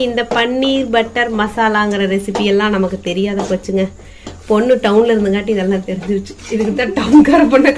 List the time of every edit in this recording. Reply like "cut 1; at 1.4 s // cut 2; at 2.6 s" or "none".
none